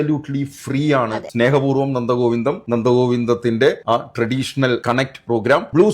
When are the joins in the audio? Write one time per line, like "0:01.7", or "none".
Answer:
0:01.2